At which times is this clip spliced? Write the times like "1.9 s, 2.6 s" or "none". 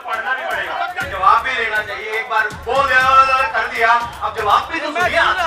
1.1 s